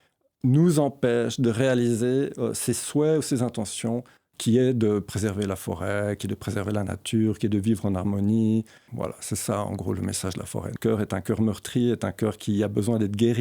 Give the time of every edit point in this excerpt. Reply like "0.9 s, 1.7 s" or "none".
8.8 s, 10.7 s